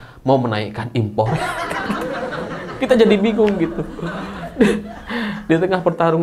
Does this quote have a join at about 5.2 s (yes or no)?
no